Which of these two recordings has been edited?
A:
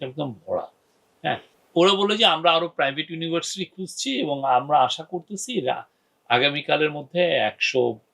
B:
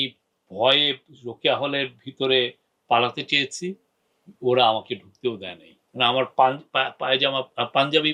A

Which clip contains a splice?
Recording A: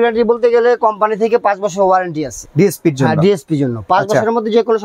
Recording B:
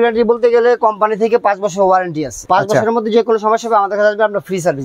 B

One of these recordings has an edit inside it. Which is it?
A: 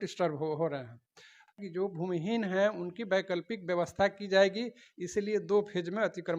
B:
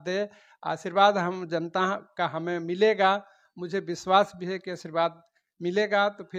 A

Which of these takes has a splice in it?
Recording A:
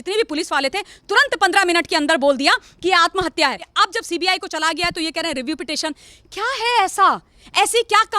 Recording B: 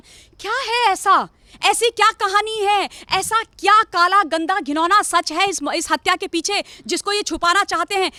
A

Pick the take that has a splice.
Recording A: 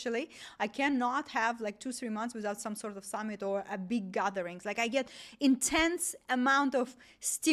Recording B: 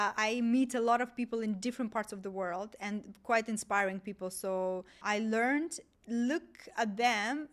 B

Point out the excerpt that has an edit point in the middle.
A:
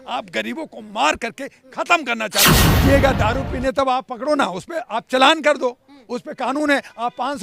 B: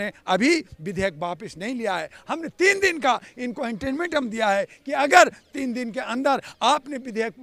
A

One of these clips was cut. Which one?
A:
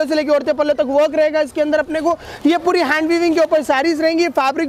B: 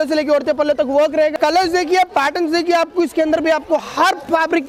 B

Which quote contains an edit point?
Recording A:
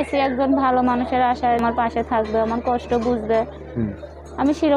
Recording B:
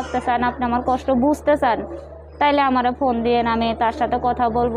A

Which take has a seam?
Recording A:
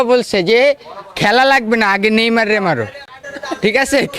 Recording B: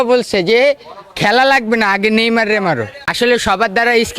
B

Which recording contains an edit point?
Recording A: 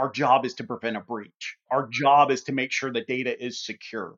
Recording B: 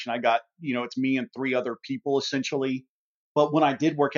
A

